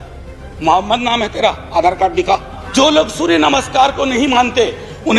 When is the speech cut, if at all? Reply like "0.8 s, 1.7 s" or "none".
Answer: 2.6 s

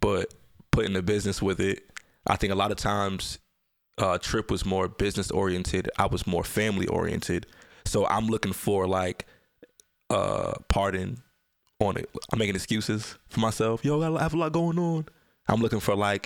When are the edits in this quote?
none

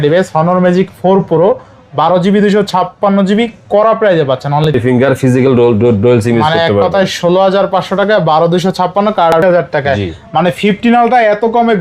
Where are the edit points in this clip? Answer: 4.8 s, 9.4 s

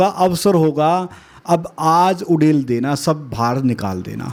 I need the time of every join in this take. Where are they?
none

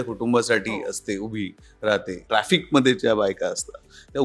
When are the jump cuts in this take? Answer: 2.2 s

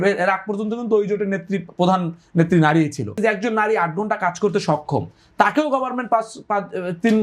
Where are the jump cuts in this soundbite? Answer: 3.1 s

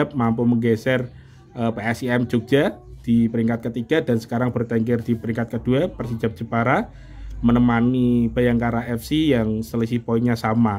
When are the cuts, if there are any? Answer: none

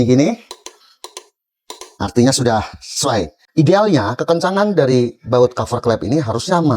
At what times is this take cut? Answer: 3.4 s

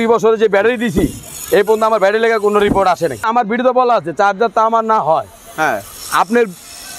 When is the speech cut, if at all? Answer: 3.2 s

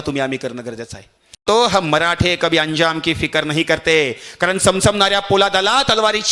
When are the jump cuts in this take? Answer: 1.4 s

